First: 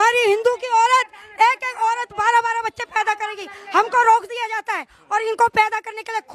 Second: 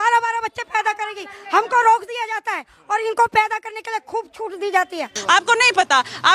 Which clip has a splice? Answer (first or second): second